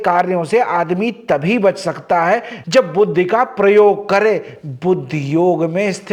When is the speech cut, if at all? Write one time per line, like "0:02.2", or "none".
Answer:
none